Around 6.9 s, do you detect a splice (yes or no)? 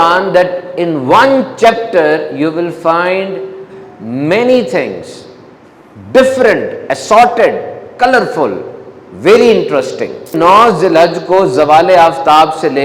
no